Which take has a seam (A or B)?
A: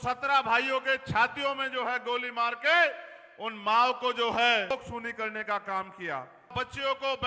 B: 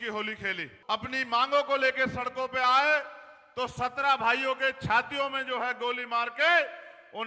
A